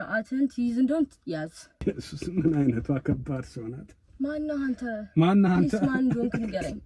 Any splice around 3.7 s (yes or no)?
no